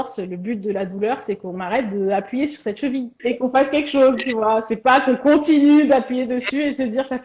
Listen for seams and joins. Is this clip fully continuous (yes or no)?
no